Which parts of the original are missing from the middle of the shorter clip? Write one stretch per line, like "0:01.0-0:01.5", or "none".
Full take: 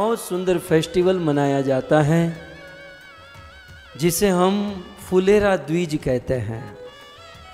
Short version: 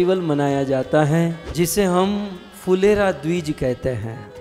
0:02.4-0:03.9